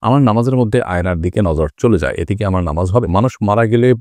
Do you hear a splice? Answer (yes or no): yes